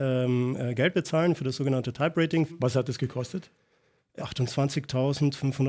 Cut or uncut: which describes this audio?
cut